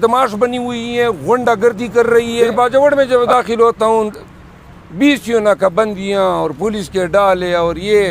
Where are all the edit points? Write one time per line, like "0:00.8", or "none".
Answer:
0:02.5